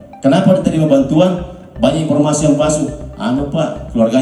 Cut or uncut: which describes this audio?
uncut